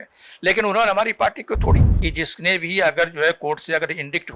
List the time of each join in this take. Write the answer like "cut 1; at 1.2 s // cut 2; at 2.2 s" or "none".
cut 1; at 1.9 s

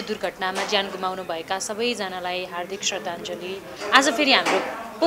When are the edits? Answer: cut 1; at 3.8 s

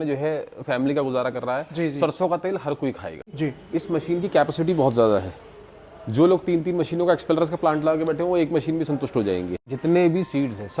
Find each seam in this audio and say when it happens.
cut 1; at 3.3 s // cut 2; at 9.7 s

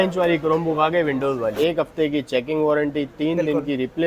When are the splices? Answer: cut 1; at 1.5 s

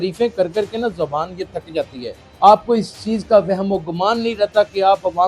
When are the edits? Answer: cut 1; at 2.2 s

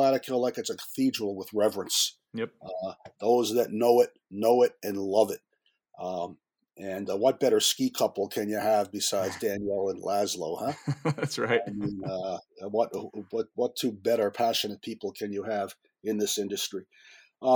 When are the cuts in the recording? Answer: none

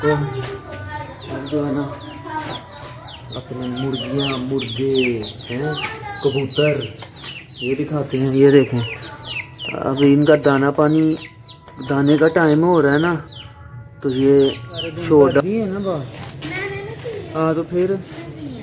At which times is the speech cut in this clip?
cut 1; at 15.4 s

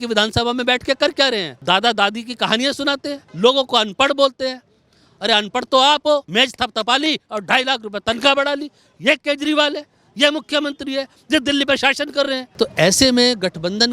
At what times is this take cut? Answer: cut 1; at 1.5 s // cut 2; at 3.2 s // cut 3; at 6.3 s // cut 4; at 12.5 s

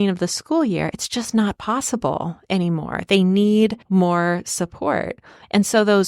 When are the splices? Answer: cut 1; at 3.8 s

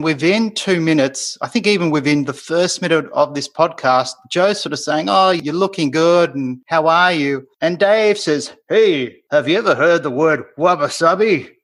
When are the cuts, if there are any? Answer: cut 1; at 5.4 s

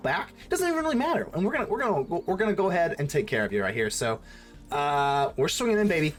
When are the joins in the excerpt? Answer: none

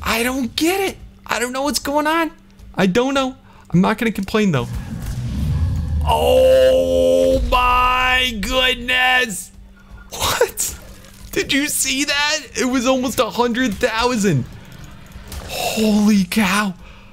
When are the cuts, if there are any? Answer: cut 1; at 4.8 s

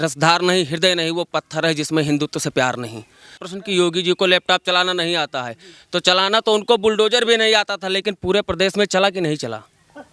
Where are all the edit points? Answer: cut 1; at 3.5 s

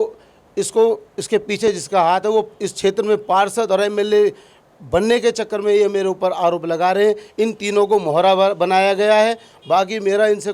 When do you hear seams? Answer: none

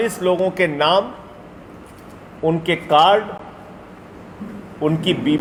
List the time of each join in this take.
none

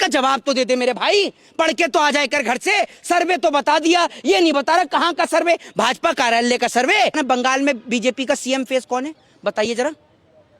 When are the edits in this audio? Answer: cut 1; at 7.1 s

